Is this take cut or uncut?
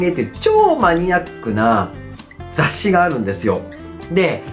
uncut